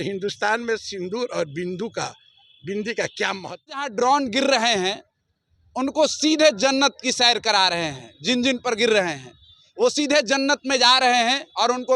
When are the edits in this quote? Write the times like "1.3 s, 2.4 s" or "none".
3.9 s